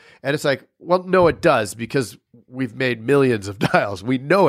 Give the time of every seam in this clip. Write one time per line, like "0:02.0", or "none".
none